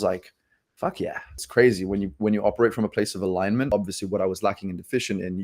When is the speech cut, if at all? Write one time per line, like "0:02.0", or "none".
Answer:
0:01.4
0:03.7